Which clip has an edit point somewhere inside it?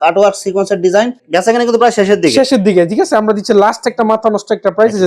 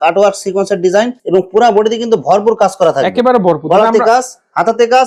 first; 1 cut; at 1.2 s

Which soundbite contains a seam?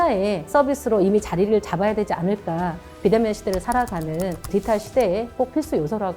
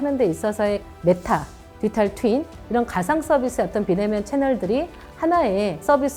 first; 1 cut; at 2.9 s

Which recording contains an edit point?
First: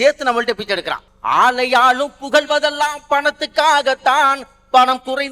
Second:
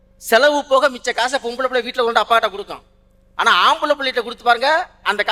first; 1 cut; at 1.1 s

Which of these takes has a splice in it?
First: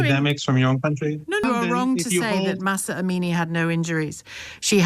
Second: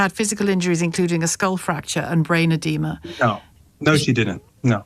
first; 1 cut; at 1.3 s

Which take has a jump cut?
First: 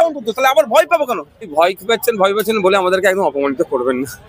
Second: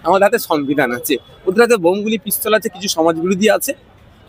first; 1 cut; at 1.5 s

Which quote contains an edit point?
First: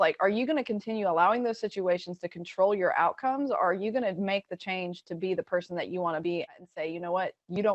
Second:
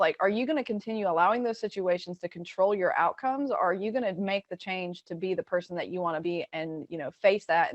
first; 1 cut; at 6.6 s

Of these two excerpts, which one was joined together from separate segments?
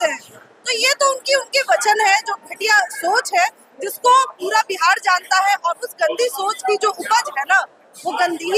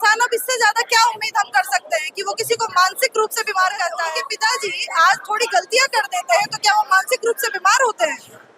second; 1 cut; at 4.2 s

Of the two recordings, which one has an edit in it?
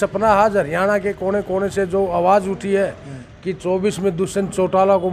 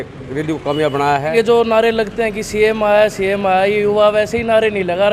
second; 1 cut; at 1.3 s

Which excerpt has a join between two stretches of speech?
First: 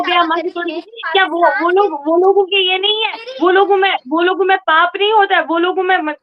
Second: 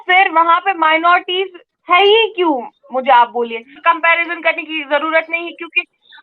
second; 1 cut; at 3.7 s

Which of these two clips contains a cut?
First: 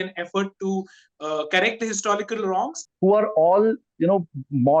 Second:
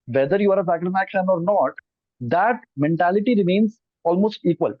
first; 1 cut; at 2.8 s

